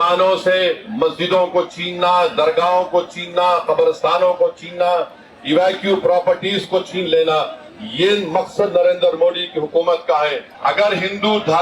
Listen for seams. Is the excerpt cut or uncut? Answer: cut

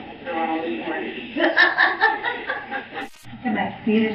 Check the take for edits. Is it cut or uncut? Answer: cut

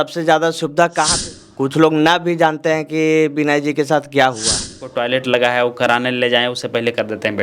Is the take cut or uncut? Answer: cut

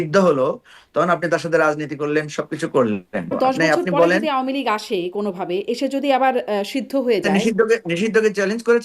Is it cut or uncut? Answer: cut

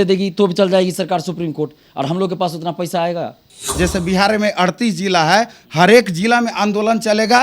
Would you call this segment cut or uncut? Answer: cut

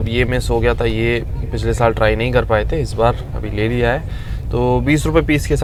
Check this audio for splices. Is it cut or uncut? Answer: uncut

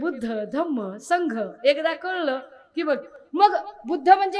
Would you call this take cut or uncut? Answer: uncut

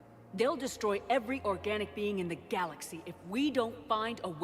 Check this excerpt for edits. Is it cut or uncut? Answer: uncut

